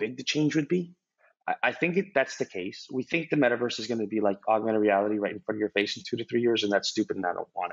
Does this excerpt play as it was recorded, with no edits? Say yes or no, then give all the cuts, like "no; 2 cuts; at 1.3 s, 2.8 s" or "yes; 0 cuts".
no; 1 cut; at 1.2 s